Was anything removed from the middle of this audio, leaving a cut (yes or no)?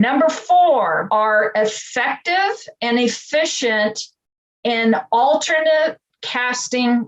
yes